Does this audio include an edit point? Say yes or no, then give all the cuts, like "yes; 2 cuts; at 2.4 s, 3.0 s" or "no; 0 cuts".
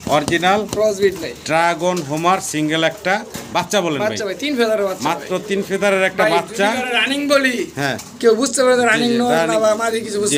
no; 0 cuts